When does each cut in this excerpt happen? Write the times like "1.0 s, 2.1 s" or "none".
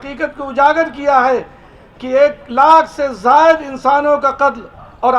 none